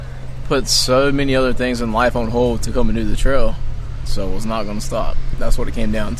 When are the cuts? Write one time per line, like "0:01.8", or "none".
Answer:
0:04.1
0:05.3